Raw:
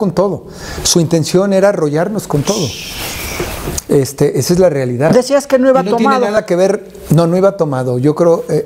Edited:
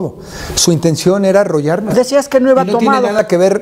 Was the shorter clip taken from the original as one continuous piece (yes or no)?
no